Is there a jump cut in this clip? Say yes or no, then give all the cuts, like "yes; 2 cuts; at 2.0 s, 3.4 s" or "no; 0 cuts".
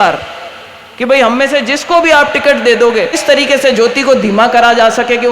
yes; 1 cut; at 3.2 s